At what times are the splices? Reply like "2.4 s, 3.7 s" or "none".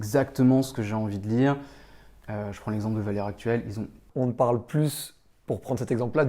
4.0 s